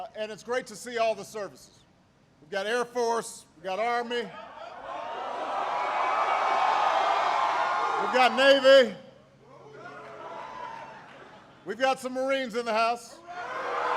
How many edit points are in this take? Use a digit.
1